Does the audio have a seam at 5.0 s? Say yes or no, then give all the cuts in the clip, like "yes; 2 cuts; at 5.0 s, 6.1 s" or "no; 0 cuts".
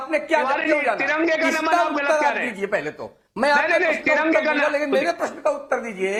no; 0 cuts